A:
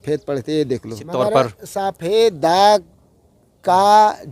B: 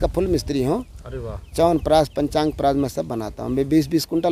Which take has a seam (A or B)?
A